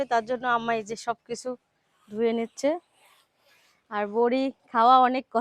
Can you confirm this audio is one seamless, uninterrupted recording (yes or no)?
yes